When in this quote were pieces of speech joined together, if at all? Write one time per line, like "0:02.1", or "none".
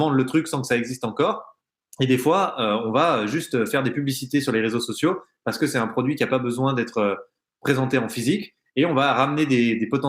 none